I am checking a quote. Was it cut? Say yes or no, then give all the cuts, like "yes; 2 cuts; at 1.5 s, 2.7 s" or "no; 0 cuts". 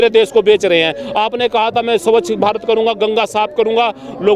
no; 0 cuts